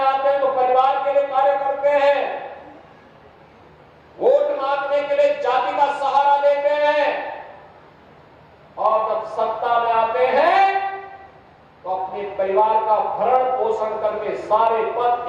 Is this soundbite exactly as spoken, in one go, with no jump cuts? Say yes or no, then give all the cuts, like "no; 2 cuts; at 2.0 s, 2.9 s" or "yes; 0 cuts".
yes; 0 cuts